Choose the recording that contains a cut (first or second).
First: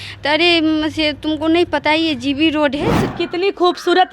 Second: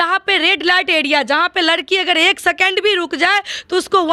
first